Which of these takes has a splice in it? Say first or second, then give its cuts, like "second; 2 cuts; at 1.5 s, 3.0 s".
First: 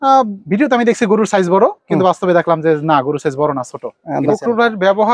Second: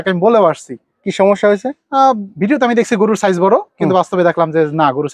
first; 1 cut; at 4.2 s